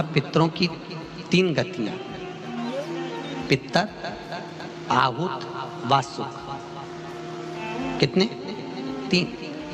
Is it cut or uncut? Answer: uncut